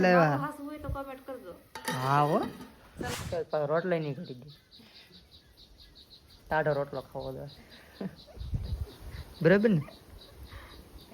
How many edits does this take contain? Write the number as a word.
one